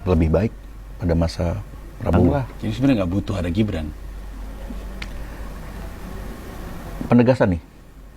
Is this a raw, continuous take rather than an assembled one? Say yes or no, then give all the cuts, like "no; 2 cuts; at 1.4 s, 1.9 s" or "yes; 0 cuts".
no; 1 cut; at 2.3 s